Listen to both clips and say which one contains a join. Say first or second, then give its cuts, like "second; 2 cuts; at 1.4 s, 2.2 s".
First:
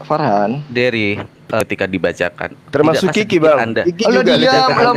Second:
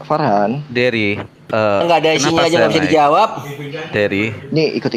first; 1 cut; at 1.6 s